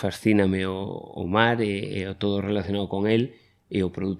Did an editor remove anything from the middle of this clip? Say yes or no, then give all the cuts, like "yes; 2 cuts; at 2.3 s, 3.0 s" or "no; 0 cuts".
no; 0 cuts